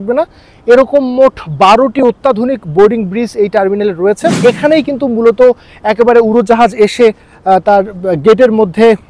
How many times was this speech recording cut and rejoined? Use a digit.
1